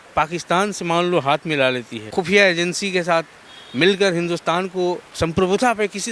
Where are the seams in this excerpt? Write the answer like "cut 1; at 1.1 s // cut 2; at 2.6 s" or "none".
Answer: cut 1; at 1.9 s // cut 2; at 5.1 s